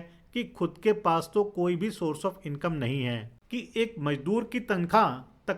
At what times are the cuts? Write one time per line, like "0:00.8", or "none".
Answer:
0:03.3